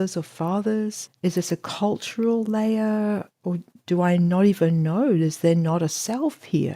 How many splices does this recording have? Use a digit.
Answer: 1